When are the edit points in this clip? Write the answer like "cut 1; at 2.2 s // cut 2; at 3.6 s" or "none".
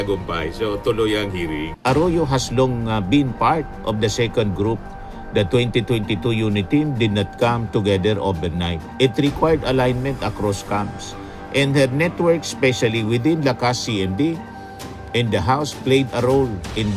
cut 1; at 1.7 s